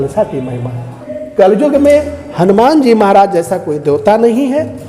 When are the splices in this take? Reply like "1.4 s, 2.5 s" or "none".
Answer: 1.2 s